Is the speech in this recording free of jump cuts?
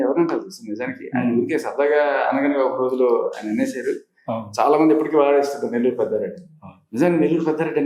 yes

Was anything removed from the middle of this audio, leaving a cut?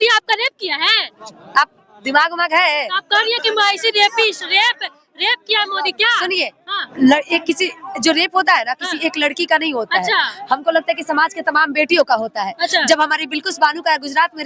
no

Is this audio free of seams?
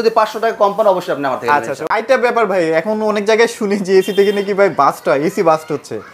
no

